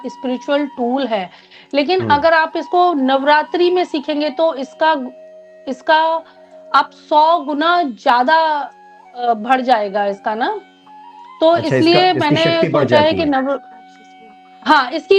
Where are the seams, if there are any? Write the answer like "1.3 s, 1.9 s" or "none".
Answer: none